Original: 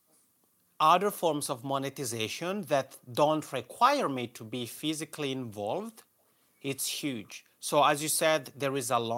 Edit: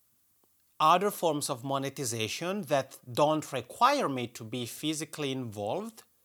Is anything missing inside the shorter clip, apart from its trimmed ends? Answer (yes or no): no